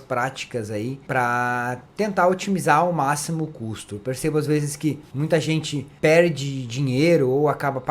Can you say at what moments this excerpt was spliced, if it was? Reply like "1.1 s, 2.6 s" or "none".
1.0 s, 1.8 s, 5.1 s, 5.8 s